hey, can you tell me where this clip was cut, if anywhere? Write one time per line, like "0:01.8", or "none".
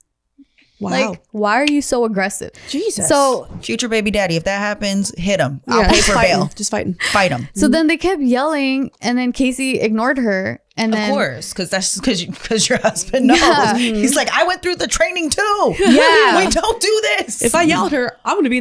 0:01.2
0:02.5